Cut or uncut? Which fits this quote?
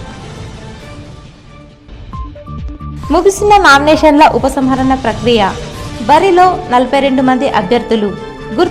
cut